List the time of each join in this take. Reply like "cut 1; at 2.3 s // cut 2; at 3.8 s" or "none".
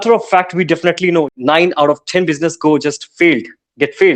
cut 1; at 1.3 s